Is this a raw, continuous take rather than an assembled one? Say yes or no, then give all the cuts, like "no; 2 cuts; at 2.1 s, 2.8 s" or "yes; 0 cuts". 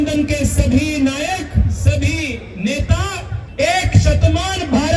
no; 1 cut; at 3.4 s